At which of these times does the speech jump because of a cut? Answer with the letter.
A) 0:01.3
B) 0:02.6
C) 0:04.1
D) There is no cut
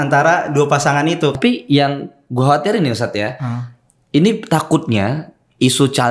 A